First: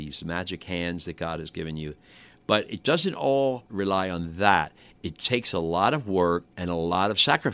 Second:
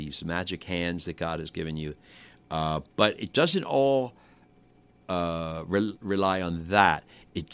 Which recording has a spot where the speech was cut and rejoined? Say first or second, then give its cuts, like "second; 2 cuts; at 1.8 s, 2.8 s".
first; 3 cuts; at 2.4 s, 3.7 s, 6.5 s